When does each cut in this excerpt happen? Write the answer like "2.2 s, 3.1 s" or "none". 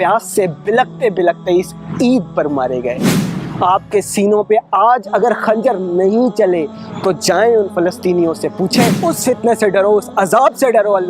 3.1 s, 9.0 s